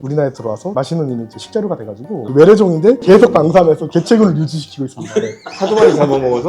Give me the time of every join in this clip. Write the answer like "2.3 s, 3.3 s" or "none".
2.2 s, 3.0 s